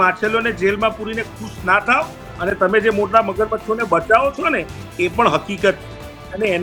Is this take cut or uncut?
uncut